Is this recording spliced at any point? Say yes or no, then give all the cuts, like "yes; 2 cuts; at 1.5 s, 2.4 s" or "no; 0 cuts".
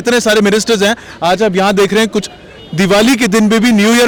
no; 0 cuts